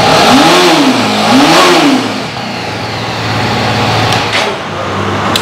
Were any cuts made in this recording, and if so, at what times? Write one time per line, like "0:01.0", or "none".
none